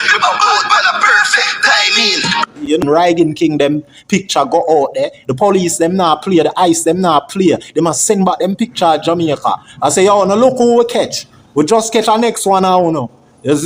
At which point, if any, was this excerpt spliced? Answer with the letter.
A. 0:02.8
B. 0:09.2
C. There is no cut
A